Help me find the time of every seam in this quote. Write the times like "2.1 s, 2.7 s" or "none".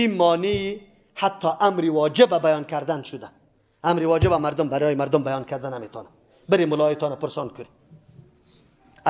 none

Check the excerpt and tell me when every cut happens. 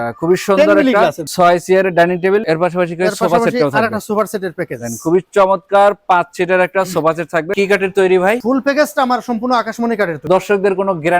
1.2 s, 2.4 s, 7.5 s, 8.4 s, 10.3 s

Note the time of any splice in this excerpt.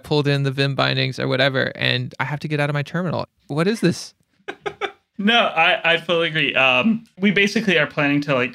3.4 s, 5.0 s, 7.1 s

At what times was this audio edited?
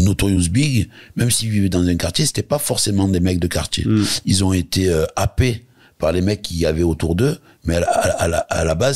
none

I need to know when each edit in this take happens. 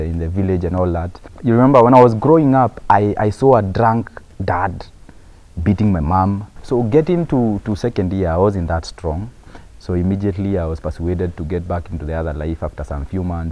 1.2 s, 6.5 s

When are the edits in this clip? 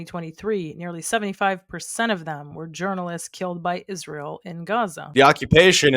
5.0 s

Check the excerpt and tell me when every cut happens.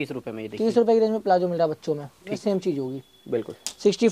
2.3 s

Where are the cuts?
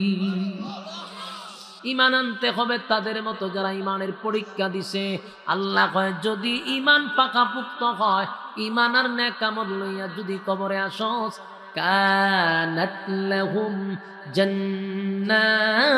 1.7 s

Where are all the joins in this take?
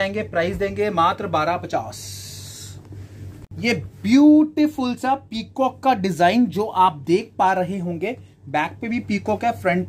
3.5 s

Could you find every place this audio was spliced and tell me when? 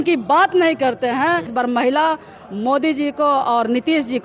1.5 s

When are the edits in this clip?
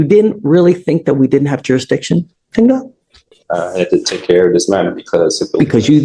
none

